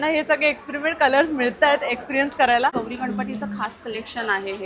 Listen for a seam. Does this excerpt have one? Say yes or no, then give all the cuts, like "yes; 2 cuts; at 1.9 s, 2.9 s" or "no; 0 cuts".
yes; 1 cut; at 2.7 s